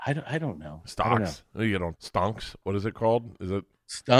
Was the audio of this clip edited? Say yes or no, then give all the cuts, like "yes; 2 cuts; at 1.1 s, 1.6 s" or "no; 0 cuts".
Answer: yes; 1 cut; at 1.9 s